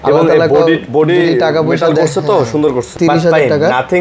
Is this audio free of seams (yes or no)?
no